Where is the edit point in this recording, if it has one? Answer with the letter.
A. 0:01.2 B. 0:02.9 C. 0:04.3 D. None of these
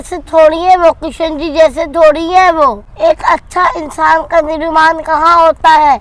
B